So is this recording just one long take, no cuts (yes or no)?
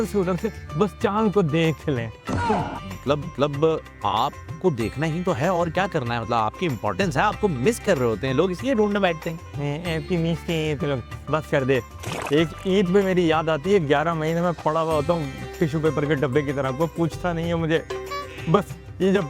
yes